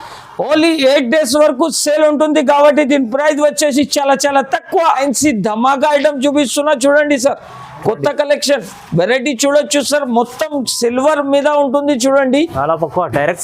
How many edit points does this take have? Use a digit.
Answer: 1